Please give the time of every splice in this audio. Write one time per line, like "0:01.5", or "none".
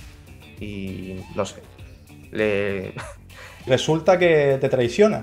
0:03.7